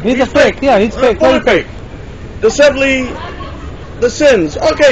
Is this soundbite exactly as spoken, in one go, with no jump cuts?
yes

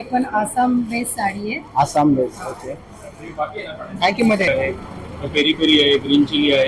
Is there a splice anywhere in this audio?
yes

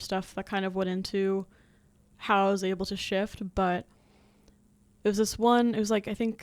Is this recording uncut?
yes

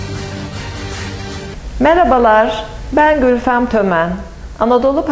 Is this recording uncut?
no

